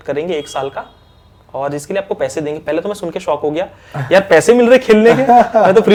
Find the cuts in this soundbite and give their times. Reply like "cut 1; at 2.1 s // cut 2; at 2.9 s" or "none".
none